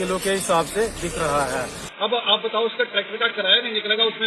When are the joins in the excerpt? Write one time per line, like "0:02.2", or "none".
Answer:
0:01.8